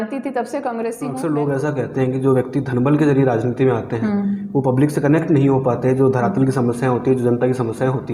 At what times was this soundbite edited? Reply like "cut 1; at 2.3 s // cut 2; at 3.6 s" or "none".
cut 1; at 1.1 s